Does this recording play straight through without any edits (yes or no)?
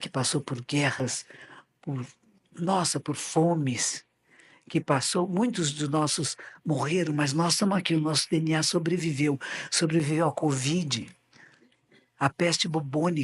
yes